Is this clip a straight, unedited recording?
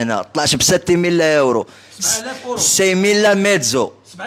yes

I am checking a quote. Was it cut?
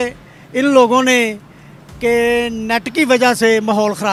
no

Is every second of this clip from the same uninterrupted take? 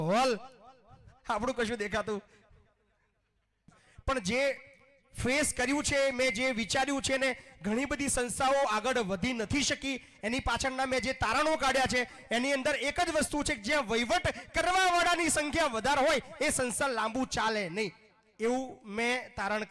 no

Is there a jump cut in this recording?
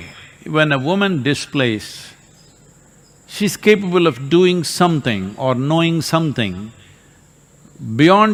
no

